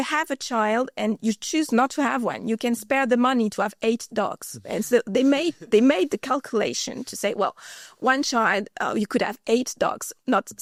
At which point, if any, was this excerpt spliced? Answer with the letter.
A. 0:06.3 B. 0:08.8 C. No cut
C